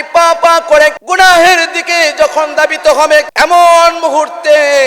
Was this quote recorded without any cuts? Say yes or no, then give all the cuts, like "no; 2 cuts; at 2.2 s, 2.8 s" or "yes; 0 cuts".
no; 2 cuts; at 1.0 s, 3.3 s